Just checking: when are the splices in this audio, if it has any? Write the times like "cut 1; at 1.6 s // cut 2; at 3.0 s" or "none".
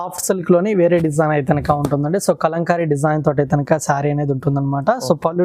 none